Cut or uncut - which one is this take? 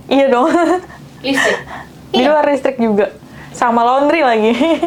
uncut